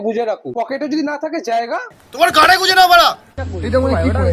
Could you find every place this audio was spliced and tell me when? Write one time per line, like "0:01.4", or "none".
0:03.4